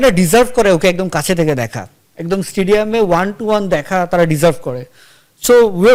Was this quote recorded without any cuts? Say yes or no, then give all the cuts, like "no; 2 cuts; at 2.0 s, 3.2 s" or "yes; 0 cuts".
yes; 0 cuts